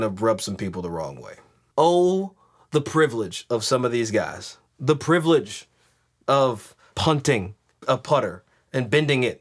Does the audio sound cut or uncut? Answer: cut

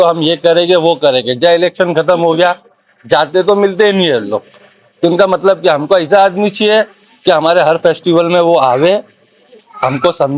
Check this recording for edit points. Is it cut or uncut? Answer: uncut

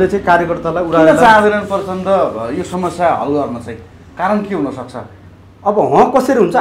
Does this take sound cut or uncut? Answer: uncut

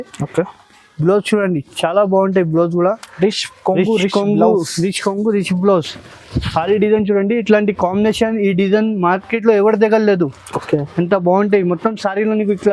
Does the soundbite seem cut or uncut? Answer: uncut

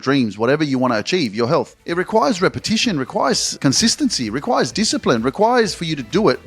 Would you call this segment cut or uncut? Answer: cut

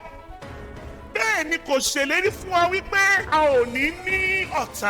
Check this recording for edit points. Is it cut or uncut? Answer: cut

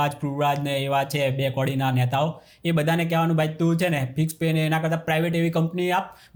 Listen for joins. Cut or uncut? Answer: uncut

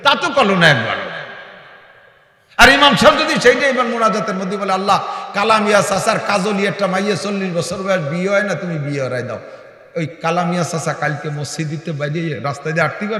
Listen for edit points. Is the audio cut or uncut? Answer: uncut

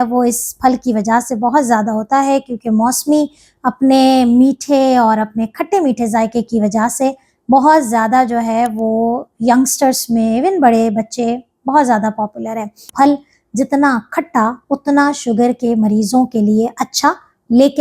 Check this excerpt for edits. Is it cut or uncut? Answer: cut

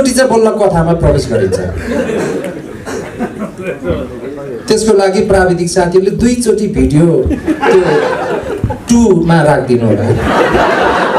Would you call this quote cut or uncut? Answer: uncut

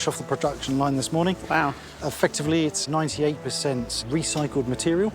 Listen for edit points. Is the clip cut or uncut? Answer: cut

